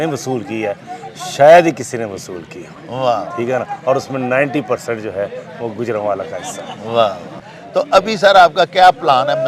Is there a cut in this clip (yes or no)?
no